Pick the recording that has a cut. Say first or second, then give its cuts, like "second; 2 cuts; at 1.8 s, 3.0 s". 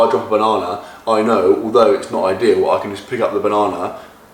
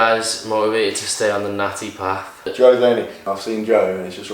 second; 2 cuts; at 2.5 s, 3.2 s